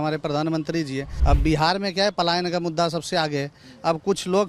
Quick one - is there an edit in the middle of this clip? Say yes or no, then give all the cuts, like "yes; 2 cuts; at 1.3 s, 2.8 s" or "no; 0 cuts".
yes; 1 cut; at 1.1 s